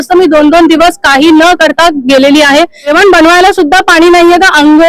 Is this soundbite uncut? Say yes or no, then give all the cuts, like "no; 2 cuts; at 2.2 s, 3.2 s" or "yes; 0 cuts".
no; 1 cut; at 2.9 s